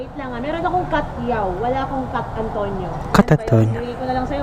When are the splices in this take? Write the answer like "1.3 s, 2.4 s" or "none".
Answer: none